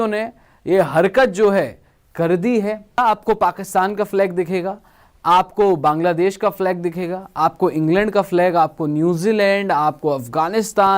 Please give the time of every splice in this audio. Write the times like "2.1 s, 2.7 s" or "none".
3.0 s